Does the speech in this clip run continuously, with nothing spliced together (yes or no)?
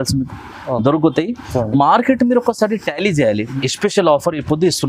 no